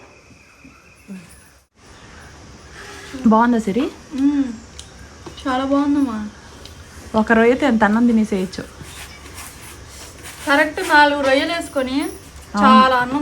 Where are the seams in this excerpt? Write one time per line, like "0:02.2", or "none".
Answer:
0:01.7